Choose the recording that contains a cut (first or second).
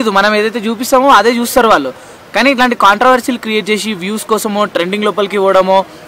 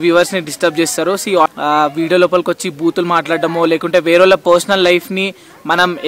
second